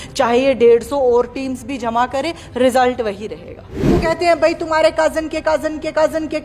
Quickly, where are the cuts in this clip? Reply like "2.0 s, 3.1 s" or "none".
4.0 s